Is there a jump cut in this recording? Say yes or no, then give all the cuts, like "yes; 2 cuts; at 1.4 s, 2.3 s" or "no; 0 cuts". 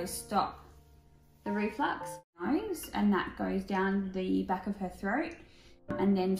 yes; 1 cut; at 2.4 s